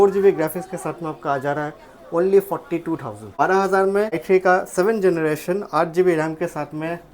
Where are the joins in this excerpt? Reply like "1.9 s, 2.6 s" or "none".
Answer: 3.3 s, 4.2 s